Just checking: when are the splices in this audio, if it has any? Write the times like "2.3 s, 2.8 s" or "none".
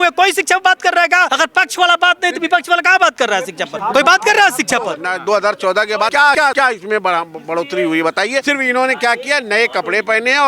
1.3 s, 3.7 s, 5.1 s, 6.3 s, 8.4 s